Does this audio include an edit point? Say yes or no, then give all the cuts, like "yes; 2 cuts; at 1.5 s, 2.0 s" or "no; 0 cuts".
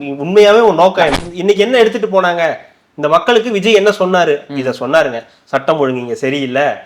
yes; 1 cut; at 1.2 s